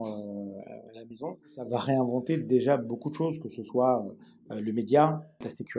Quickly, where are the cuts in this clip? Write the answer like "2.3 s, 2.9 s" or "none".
1.7 s